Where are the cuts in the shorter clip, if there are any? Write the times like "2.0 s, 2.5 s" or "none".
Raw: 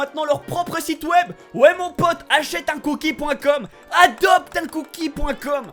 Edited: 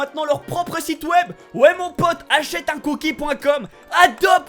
none